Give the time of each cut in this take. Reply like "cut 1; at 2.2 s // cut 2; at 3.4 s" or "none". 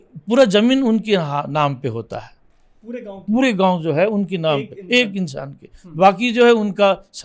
none